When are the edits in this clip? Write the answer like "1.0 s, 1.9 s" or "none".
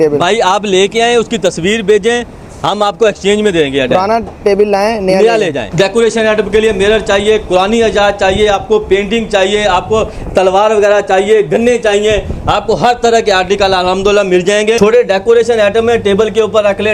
5.6 s, 14.8 s